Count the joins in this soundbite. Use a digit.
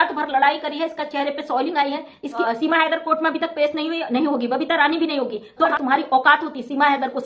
2